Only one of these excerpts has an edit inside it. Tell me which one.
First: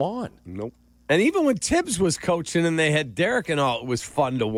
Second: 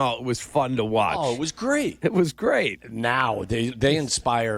second; 2 cuts; at 2.0 s, 2.8 s

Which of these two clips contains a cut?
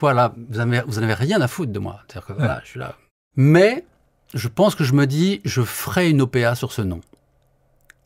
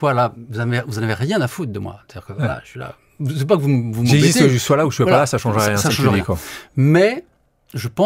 first; 1 cut; at 3.1 s

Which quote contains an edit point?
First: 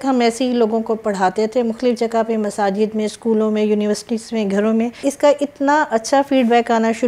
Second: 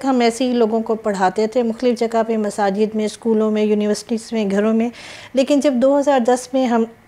first; 1 cut; at 5.0 s

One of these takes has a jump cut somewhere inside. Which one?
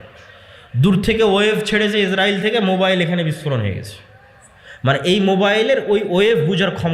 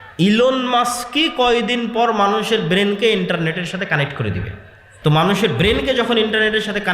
second; 1 cut; at 4.8 s

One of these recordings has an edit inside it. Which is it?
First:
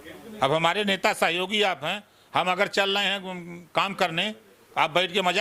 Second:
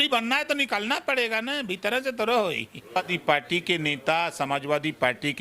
second; 1 cut; at 3.0 s

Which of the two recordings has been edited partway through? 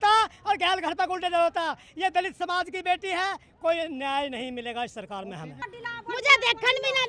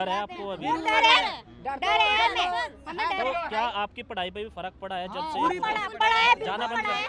first; 1 cut; at 5.6 s

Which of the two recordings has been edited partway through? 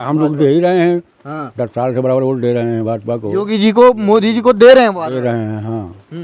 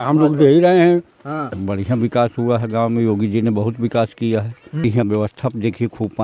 second; 2 cuts; at 1.5 s, 4.8 s

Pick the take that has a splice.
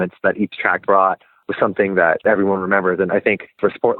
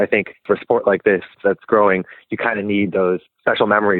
first; 1 cut; at 2.2 s

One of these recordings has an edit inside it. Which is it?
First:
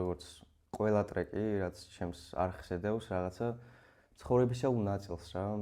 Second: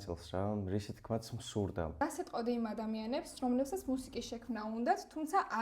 second; 1 cut; at 2.0 s

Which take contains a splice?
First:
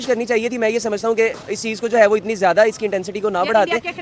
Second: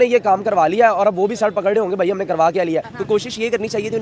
second; 1 cut; at 2.9 s

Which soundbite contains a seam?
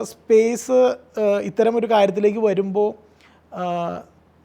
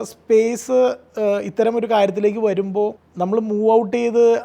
second; 1 cut; at 3.0 s

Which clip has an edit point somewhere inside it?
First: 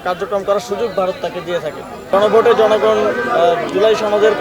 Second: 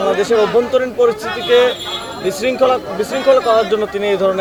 first; 1 cut; at 2.1 s

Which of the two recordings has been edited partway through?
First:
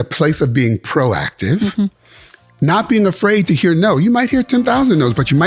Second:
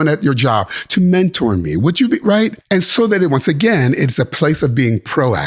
second; 1 cut; at 2.6 s

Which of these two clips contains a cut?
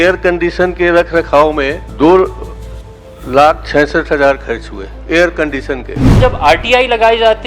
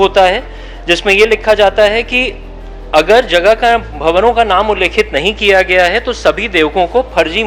first; 2 cuts; at 1.8 s, 6.2 s

